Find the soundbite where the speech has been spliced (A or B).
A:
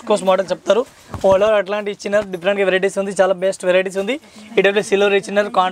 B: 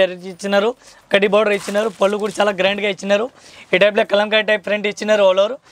B